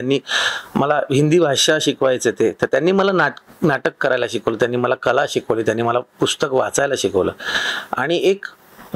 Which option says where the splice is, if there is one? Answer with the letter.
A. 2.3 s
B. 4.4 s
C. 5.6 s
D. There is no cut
D